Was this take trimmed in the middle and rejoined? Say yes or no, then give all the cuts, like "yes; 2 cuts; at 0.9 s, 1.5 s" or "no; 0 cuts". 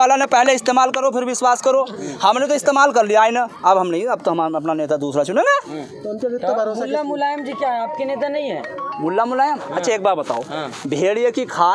no; 0 cuts